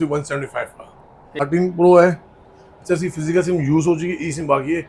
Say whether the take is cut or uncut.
cut